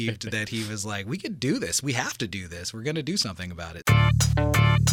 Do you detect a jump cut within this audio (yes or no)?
yes